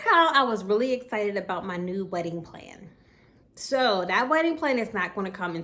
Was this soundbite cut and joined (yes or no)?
no